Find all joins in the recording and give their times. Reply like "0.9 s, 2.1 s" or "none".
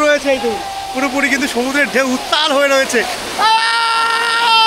3.2 s